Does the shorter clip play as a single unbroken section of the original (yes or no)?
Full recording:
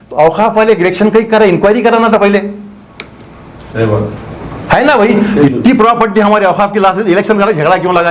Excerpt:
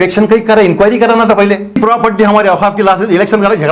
no